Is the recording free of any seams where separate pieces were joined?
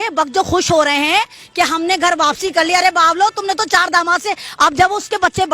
yes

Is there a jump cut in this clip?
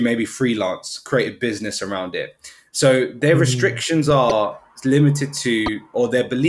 no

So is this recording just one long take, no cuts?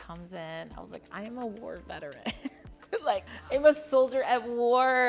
yes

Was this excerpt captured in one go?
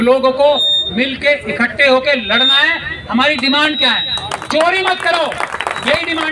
yes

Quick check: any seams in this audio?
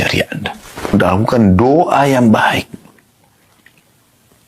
yes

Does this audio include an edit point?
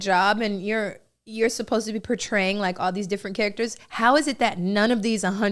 no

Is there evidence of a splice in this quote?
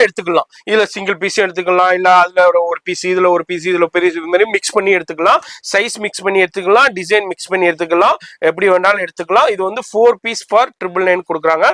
no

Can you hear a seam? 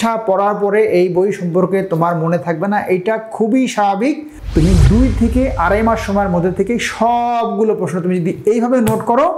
yes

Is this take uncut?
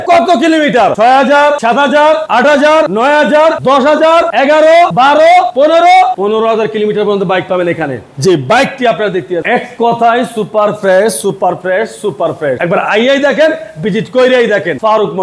yes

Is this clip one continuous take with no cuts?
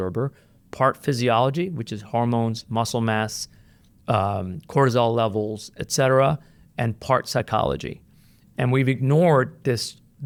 yes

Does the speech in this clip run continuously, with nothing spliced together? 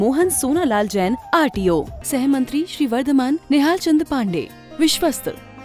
yes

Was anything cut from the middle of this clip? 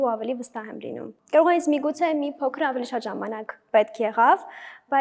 no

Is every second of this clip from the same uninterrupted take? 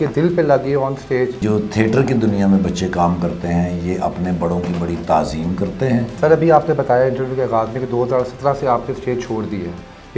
no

